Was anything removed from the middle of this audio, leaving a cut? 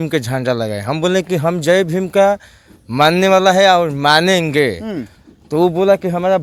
no; 0 cuts

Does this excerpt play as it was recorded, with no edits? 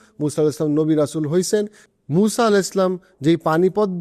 no; 1 cut; at 1.8 s

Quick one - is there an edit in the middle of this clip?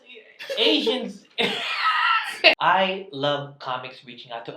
yes; 1 cut; at 2.6 s

